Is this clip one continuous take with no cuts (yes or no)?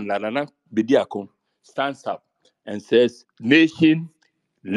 no